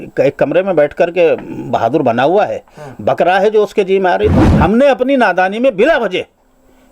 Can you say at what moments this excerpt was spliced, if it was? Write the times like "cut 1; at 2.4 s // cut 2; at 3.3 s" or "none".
cut 1; at 4.4 s

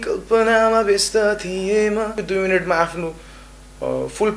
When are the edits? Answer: cut 1; at 2.2 s

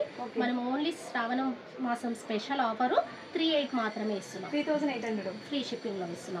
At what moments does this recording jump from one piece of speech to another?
none

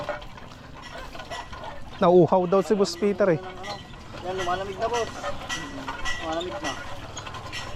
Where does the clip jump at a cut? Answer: none

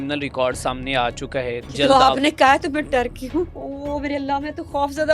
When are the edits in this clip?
cut 1; at 1.7 s // cut 2; at 3.6 s

